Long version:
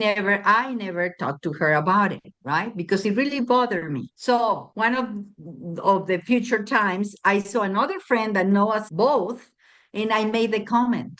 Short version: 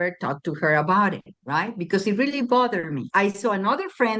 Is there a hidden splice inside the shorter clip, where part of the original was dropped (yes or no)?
yes